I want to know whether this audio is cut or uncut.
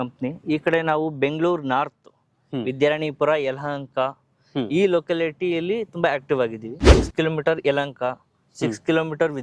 cut